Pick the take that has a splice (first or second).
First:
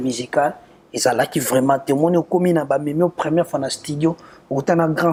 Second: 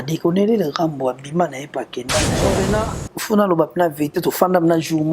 second